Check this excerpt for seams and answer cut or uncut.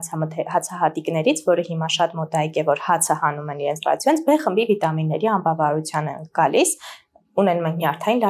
uncut